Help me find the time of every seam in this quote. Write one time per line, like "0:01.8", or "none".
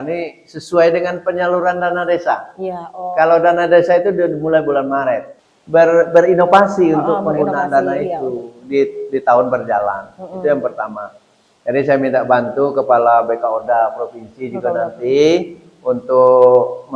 0:05.4

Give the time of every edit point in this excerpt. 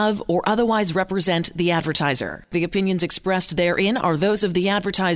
none

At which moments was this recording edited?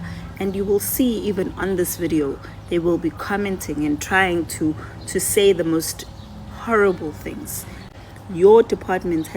0:07.9

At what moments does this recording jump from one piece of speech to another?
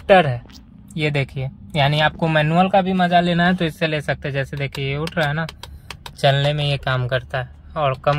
none

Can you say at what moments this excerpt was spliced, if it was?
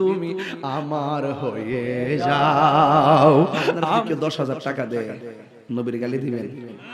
0:03.8

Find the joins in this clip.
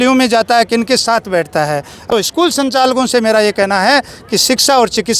0:01.9

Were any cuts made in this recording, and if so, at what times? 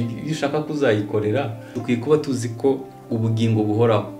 0:01.7

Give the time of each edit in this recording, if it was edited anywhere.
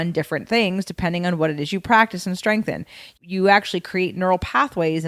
0:03.2

